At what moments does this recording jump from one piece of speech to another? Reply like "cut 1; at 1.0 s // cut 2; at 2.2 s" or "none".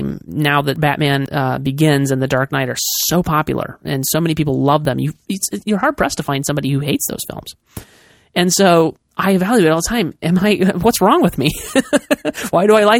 cut 1; at 1.0 s // cut 2; at 4.8 s